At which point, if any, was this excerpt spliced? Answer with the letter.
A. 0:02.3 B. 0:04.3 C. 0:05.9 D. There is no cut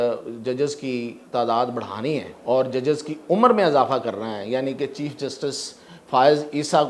A